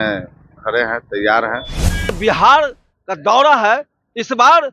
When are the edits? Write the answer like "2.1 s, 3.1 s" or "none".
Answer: 2.2 s